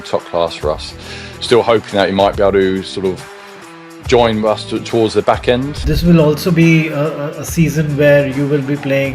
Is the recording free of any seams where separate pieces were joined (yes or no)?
no